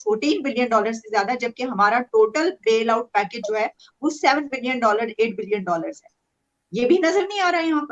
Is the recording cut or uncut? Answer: uncut